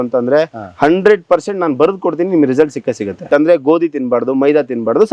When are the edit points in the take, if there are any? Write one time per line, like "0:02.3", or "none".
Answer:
0:03.3

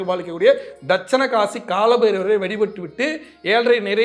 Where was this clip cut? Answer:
none

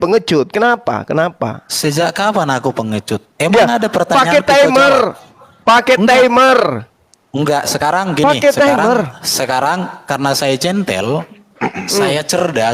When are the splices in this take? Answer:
none

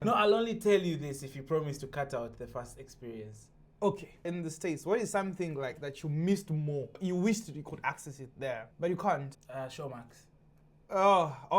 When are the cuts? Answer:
0:04.1
0:06.9
0:08.7
0:09.4

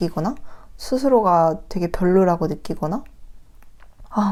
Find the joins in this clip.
none

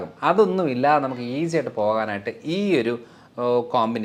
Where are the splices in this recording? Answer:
none

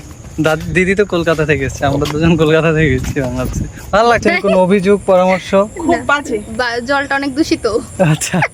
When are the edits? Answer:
0:04.2

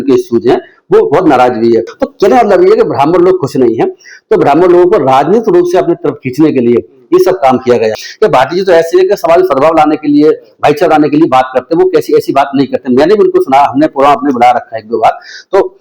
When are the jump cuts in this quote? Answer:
0:07.9

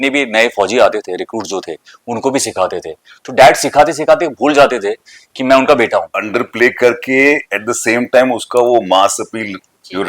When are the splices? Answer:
0:06.2

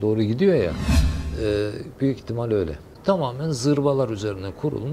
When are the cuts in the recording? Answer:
0:02.9

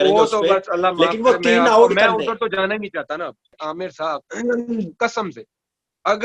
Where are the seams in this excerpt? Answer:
0:03.5

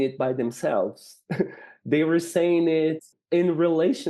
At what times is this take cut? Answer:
0:03.1

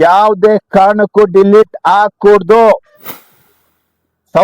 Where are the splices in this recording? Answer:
0:03.3

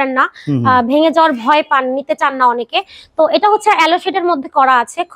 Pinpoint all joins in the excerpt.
none

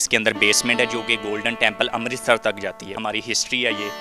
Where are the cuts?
0:03.0

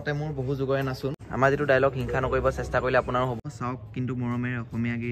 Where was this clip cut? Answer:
0:01.3
0:03.4

